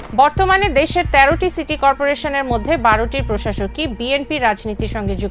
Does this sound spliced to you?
no; 0 cuts

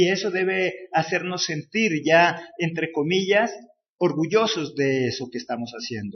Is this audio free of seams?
yes; 0 cuts

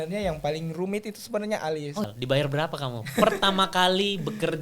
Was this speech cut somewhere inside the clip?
yes; 1 cut; at 2.0 s

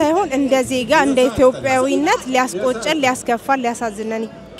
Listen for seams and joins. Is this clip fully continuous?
yes; 0 cuts

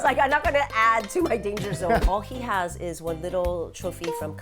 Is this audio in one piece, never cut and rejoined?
no; 1 cut; at 2.0 s

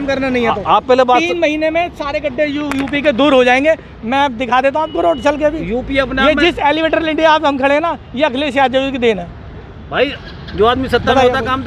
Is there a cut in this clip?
no; 0 cuts

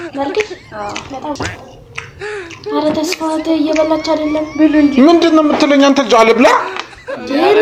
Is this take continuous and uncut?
yes; 0 cuts

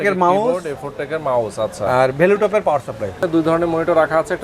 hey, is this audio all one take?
no; 1 cut; at 3.2 s

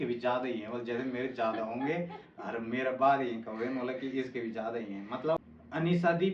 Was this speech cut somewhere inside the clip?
yes; 1 cut; at 5.4 s

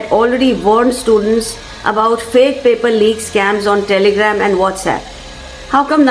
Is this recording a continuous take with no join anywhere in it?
yes; 0 cuts

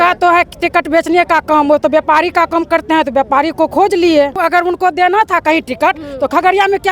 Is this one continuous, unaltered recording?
no; 1 cut; at 4.4 s

